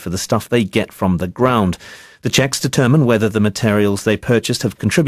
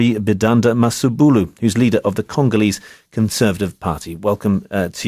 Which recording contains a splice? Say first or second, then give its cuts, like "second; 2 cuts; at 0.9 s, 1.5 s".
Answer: first; 1 cut; at 2.3 s